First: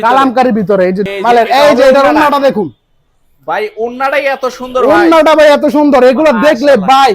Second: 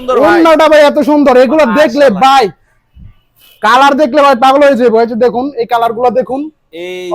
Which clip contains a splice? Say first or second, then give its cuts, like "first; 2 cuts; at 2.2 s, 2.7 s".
first; 1 cut; at 1.1 s